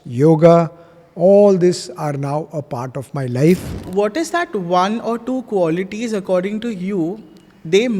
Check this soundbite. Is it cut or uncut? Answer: cut